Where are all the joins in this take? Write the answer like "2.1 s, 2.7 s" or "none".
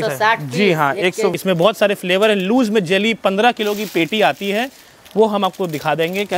1.4 s